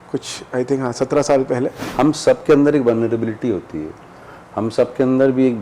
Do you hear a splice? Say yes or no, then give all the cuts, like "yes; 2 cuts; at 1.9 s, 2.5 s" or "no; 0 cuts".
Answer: yes; 1 cut; at 1.8 s